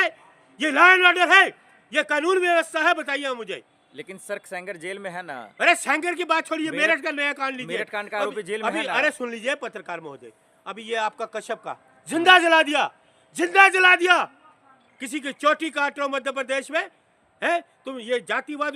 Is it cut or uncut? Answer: uncut